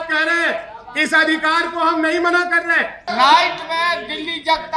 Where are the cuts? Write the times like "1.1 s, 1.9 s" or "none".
3.0 s